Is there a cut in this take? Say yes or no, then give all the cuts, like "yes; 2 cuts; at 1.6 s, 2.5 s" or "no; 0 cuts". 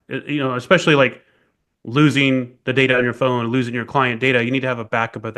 no; 0 cuts